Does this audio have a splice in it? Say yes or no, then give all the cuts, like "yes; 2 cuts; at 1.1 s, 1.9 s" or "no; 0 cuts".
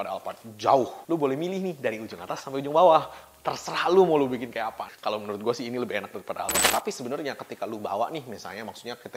yes; 3 cuts; at 1.0 s, 4.9 s, 6.6 s